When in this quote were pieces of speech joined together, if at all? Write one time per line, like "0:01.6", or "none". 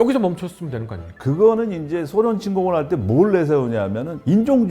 0:01.0